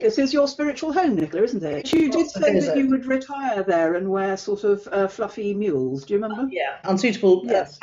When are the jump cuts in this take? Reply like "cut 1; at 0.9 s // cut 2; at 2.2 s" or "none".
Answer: cut 1; at 1.9 s // cut 2; at 6.8 s